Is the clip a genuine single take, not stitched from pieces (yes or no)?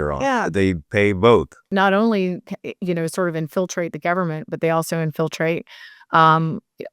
no